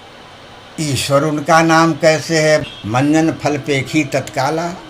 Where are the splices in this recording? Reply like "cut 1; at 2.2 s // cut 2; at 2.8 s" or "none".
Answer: cut 1; at 2.7 s